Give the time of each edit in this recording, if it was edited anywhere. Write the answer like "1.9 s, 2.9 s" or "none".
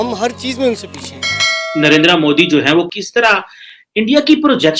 1.4 s, 3.0 s